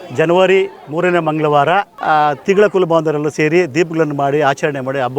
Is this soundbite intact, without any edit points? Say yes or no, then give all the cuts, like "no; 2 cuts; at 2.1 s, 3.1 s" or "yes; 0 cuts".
no; 1 cut; at 1.9 s